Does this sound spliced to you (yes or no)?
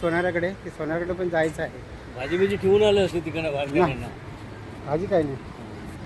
no